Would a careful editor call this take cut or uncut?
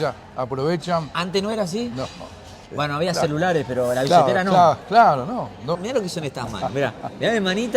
cut